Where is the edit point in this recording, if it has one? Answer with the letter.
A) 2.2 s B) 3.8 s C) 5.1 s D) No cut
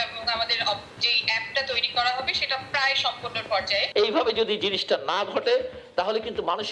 B